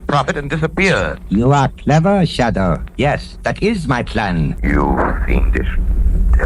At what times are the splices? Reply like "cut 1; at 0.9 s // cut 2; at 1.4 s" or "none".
cut 1; at 4.6 s